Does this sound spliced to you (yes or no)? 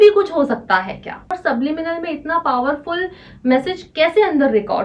yes